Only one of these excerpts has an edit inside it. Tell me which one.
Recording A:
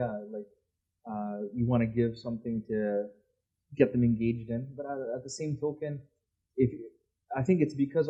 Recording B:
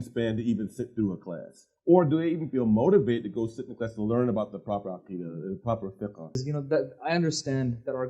B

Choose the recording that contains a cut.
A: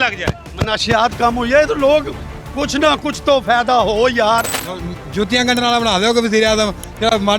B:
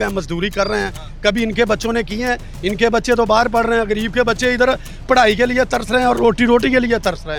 A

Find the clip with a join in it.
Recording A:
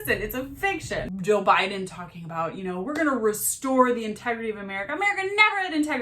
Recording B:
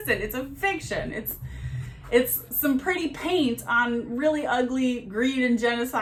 A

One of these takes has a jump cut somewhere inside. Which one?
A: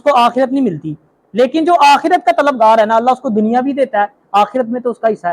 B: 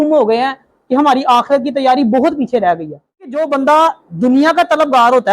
B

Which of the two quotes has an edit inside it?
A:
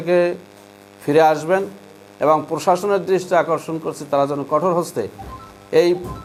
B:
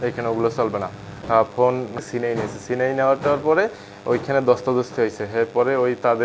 B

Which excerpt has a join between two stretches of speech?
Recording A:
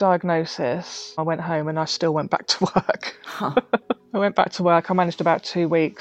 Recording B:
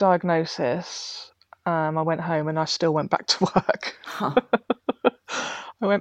A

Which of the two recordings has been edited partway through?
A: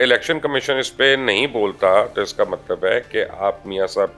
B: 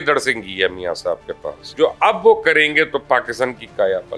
B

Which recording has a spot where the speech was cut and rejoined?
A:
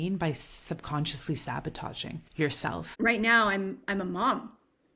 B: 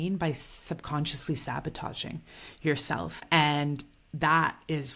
A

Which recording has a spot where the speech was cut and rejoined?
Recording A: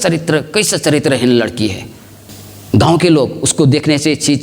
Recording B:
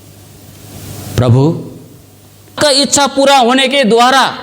B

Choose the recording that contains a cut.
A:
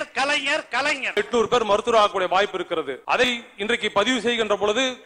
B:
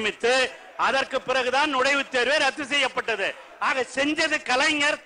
A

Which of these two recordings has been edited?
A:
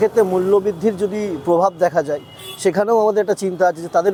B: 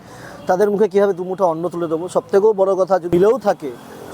B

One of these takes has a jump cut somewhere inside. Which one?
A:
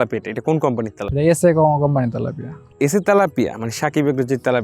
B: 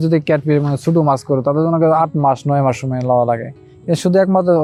A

